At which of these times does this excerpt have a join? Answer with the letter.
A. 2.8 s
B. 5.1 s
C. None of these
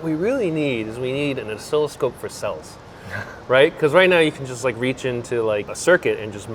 C